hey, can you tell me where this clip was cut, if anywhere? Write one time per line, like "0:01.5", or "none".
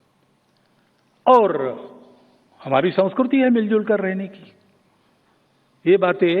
0:04.0